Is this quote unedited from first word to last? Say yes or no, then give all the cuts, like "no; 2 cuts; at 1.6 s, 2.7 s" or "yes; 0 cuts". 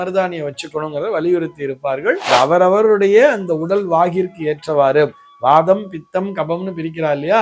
no; 1 cut; at 2.2 s